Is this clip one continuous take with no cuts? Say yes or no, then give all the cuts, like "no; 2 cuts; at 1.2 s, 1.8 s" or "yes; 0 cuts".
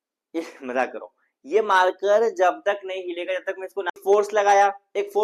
no; 1 cut; at 3.9 s